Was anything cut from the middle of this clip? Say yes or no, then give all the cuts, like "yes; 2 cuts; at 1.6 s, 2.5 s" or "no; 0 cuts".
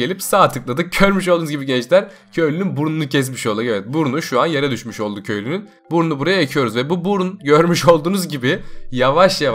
yes; 1 cut; at 5.7 s